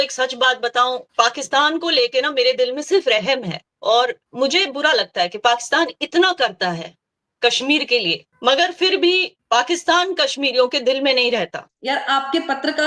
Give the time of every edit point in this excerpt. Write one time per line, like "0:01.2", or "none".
0:01.1
0:04.2
0:08.3
0:09.3
0:11.7